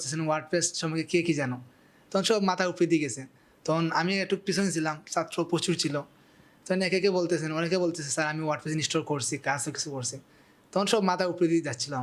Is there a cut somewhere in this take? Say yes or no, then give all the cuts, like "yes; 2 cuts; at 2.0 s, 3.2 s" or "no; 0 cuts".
no; 0 cuts